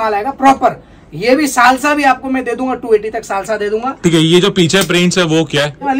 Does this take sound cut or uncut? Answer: uncut